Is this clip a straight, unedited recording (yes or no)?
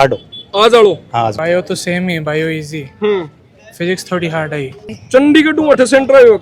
no